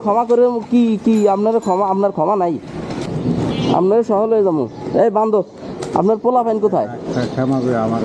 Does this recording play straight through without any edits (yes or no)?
no